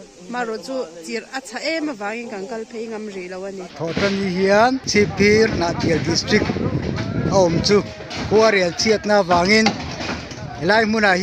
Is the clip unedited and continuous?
no; 2 cuts; at 3.8 s, 4.8 s

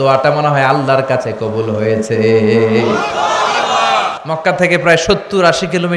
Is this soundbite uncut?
no; 1 cut; at 4.1 s

